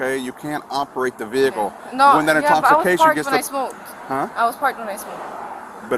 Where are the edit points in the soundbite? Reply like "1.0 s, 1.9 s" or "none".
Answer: none